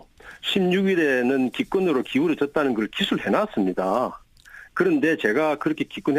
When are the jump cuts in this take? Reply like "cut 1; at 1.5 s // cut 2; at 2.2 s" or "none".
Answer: cut 1; at 2.3 s